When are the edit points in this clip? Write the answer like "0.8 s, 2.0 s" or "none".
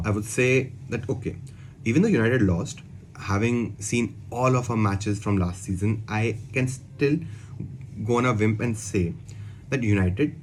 none

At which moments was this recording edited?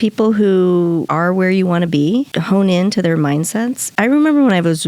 1.1 s, 2.4 s, 3.9 s

